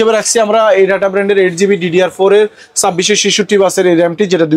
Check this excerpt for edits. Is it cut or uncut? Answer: uncut